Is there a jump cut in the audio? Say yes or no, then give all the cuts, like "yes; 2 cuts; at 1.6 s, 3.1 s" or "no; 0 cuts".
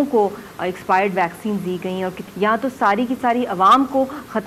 yes; 1 cut; at 2.2 s